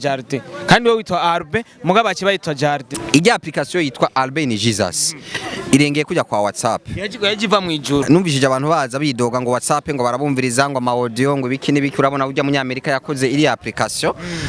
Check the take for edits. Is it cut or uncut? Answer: cut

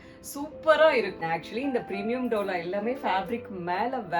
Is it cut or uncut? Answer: cut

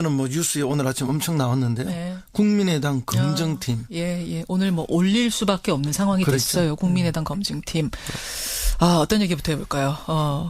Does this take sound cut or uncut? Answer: cut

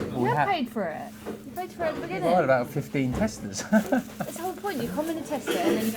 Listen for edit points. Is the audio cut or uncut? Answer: uncut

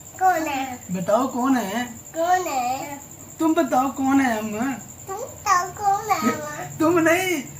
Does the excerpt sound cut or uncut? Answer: uncut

